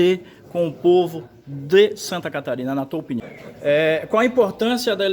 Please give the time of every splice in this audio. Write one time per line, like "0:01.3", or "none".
0:03.4